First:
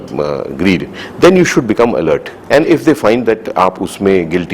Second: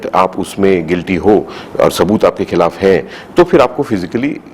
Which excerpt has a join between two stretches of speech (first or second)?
first